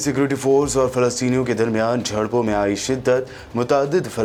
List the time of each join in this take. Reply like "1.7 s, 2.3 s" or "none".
none